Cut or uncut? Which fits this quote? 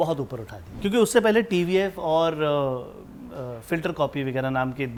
uncut